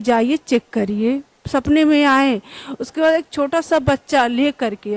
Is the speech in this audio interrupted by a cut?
no; 0 cuts

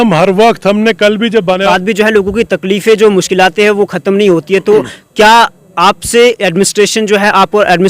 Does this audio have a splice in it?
yes; 1 cut; at 1.7 s

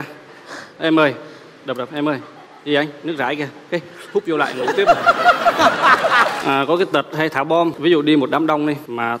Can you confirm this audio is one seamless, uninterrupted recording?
no; 2 cuts; at 6.4 s, 7.8 s

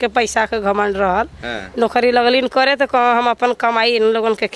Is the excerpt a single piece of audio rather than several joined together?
yes; 0 cuts

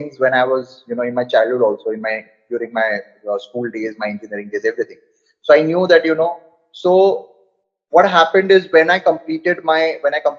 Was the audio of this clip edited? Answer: no; 0 cuts

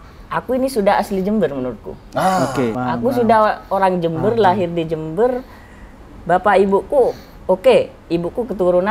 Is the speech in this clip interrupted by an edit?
yes; 1 cut; at 2.8 s

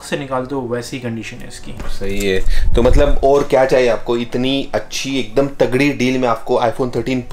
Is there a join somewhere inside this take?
no; 0 cuts

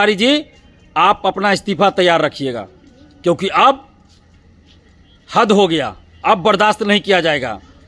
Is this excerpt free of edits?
yes; 0 cuts

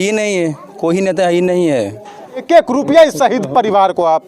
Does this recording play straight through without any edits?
no; 1 cut; at 2.4 s

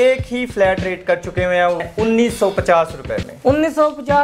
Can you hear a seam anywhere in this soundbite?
yes; 1 cut; at 1.8 s

